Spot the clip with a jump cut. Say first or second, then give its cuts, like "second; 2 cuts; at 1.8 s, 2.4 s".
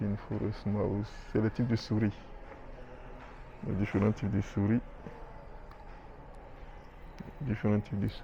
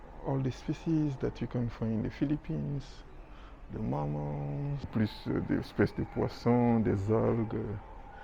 second; 1 cut; at 4.9 s